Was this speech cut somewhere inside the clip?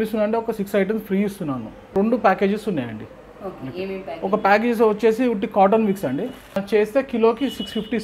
yes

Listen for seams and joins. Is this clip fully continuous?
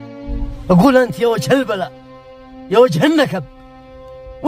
yes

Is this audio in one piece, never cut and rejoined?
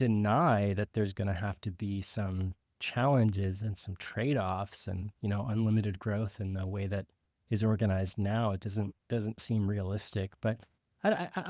yes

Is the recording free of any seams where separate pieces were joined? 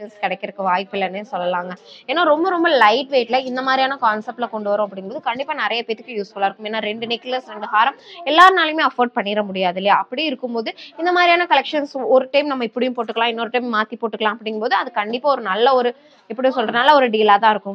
yes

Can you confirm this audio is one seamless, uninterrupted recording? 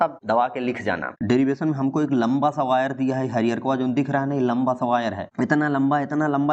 no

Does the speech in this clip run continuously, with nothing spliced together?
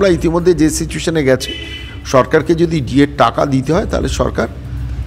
yes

